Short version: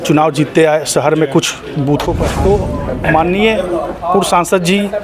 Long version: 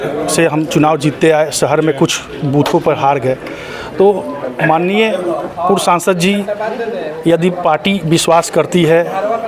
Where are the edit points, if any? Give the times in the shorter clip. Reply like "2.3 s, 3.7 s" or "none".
2.2 s